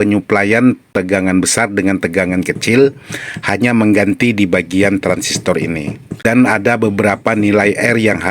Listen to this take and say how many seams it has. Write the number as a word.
two